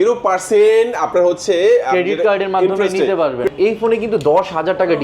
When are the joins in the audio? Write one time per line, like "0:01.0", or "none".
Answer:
0:03.5